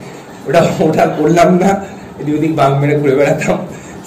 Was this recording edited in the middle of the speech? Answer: no; 0 cuts

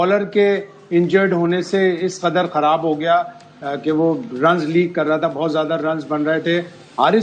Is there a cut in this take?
no; 0 cuts

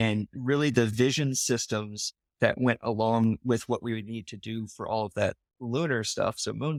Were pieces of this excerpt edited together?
no; 0 cuts

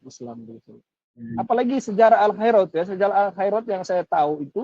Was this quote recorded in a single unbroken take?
no; 1 cut; at 1.3 s

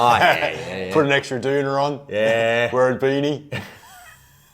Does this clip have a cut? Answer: no; 0 cuts

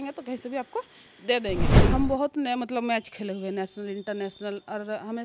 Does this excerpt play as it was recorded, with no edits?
no; 1 cut; at 1.7 s

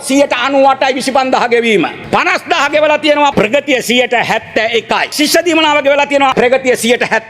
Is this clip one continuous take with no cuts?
no; 4 cuts; at 2.0 s, 3.3 s, 5.1 s, 6.3 s

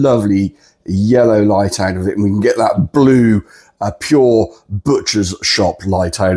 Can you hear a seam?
no; 0 cuts

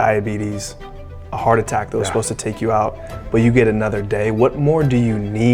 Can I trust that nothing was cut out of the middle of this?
yes; 0 cuts

